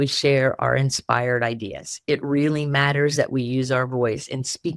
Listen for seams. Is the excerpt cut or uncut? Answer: uncut